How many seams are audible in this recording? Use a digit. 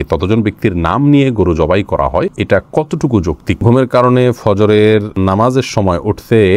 3